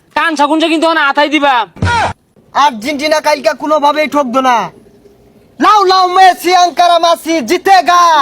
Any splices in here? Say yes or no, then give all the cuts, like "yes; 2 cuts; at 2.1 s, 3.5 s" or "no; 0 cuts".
yes; 1 cut; at 2.1 s